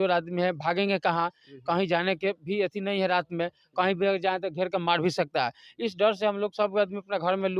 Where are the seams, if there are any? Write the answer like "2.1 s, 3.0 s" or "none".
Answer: none

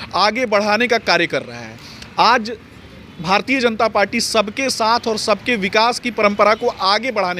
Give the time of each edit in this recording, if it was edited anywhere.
none

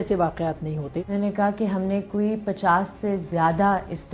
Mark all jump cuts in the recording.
1.1 s

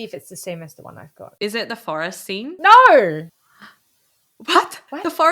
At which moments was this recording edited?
1.2 s

